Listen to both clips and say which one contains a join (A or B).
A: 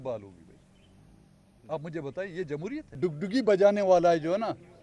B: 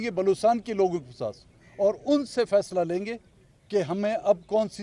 A